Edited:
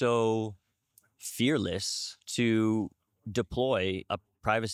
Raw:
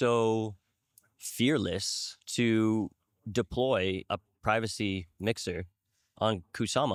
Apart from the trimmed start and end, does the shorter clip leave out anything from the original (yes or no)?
no